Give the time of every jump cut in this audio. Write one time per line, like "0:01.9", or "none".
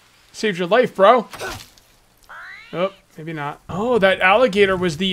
0:03.6